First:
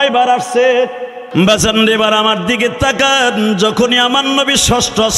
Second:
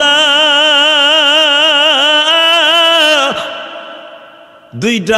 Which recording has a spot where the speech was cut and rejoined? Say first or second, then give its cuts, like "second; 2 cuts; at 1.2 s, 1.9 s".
first; 1 cut; at 1.2 s